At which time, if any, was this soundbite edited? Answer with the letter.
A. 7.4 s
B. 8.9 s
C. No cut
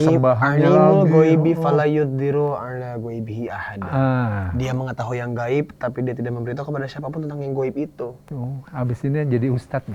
C